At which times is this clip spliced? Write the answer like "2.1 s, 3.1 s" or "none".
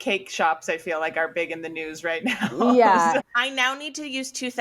3.2 s